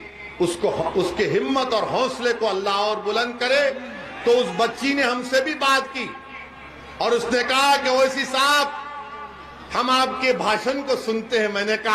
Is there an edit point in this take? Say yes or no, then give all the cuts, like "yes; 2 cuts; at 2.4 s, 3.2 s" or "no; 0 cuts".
no; 0 cuts